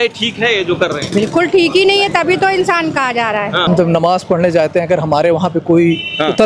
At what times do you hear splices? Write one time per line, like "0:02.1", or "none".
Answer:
0:03.7